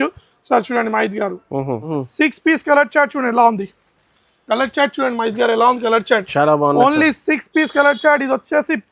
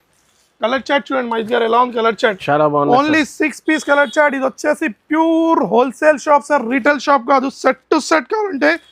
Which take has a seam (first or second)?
first